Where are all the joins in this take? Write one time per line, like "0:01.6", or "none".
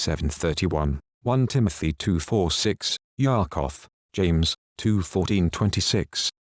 none